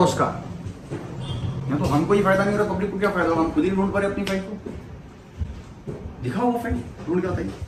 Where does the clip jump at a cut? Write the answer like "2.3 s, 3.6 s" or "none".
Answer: none

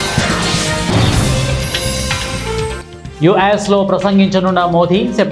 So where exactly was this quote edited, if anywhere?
2.9 s

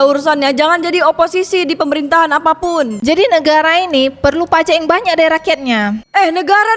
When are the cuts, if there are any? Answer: 2.9 s

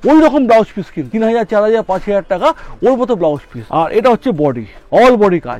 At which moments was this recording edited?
1.0 s, 3.5 s, 4.7 s

